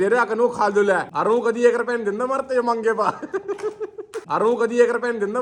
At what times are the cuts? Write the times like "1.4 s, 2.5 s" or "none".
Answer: none